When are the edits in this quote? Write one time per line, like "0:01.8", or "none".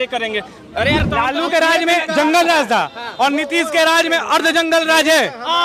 0:01.0